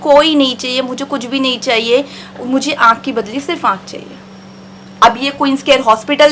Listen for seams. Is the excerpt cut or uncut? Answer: uncut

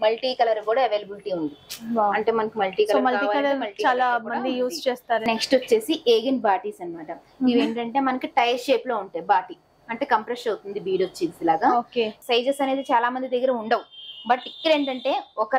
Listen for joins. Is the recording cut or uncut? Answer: cut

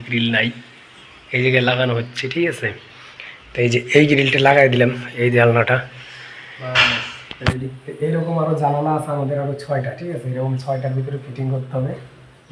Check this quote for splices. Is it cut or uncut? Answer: uncut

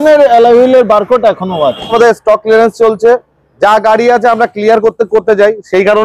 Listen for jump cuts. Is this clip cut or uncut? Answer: cut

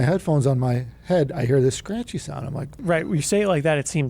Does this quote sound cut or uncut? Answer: cut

